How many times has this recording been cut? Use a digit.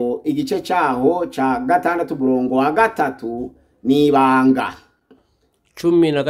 0